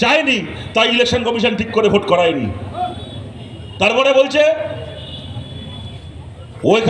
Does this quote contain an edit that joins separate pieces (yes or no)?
no